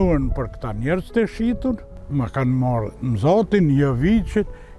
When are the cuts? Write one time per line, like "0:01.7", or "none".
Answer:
0:01.9